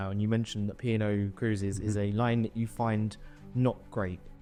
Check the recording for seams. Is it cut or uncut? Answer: uncut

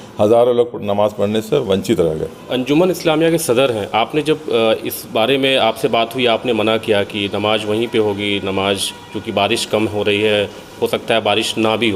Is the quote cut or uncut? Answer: cut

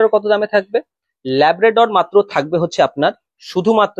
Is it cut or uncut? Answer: uncut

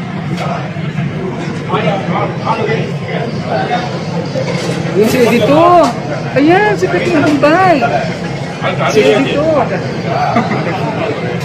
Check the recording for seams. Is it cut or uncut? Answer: uncut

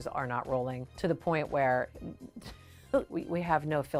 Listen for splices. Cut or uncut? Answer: uncut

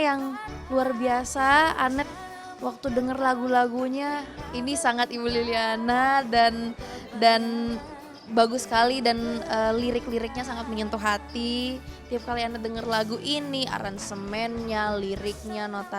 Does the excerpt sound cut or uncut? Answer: uncut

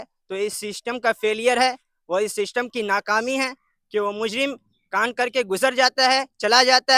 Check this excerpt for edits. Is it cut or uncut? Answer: uncut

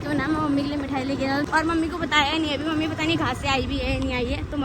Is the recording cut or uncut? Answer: cut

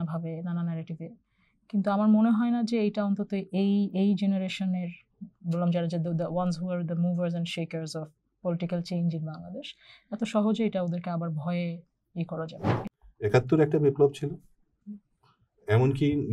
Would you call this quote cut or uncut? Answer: cut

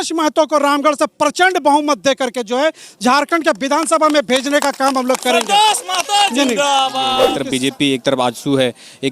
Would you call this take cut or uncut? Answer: cut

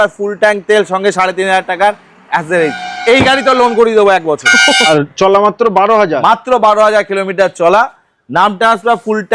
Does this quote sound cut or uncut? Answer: cut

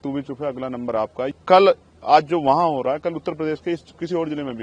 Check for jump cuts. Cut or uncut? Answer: cut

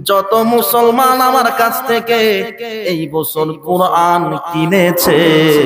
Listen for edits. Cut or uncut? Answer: uncut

